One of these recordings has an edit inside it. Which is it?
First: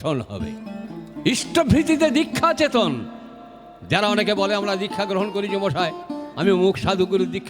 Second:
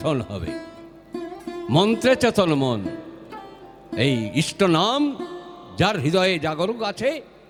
first; 1 cut; at 1.0 s

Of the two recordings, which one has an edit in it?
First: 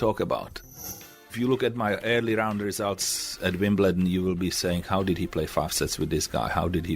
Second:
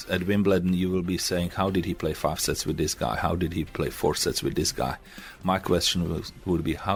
first; 1 cut; at 1.0 s

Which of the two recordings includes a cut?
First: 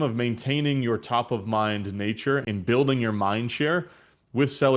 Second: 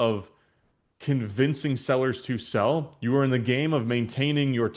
first; 1 cut; at 2.5 s

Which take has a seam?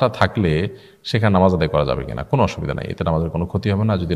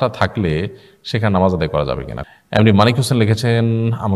second; 1 cut; at 2.1 s

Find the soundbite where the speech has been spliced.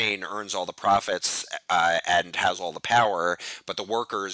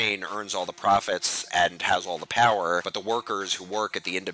second; 2 cuts; at 1.5 s, 2.9 s

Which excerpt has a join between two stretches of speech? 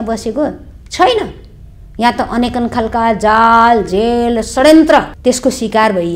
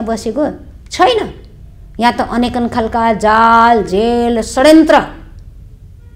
first; 1 cut; at 5.1 s

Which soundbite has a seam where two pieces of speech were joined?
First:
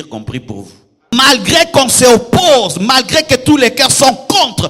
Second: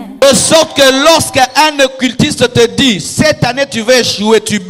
first; 1 cut; at 1.1 s

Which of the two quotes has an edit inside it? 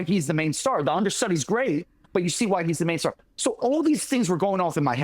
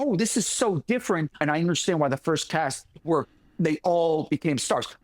second; 1 cut; at 1.4 s

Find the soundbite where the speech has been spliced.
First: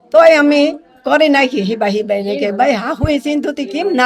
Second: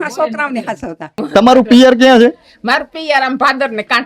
second; 1 cut; at 1.2 s

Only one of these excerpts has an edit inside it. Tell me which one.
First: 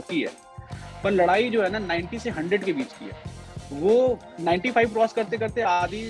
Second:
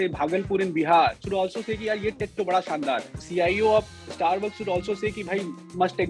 second; 2 cuts; at 1.2 s, 3.2 s

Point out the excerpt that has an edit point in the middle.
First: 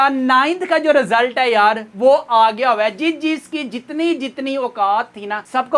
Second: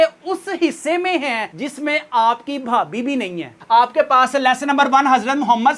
second; 1 cut; at 3.6 s

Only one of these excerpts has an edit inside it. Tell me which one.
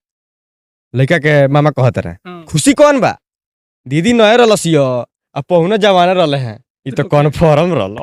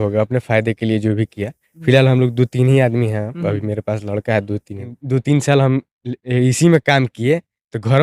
second; 1 cut; at 5.0 s

